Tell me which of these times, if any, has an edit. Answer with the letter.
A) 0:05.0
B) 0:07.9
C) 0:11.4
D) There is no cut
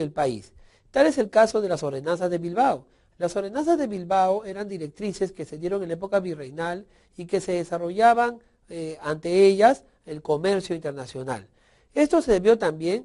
D